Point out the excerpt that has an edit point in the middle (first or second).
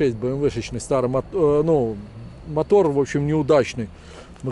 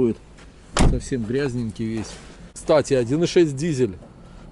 second